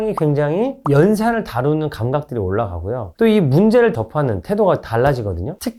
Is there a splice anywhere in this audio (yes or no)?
no